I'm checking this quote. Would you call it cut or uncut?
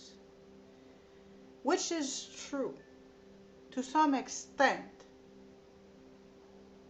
cut